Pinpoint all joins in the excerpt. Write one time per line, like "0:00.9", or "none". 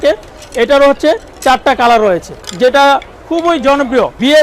0:02.4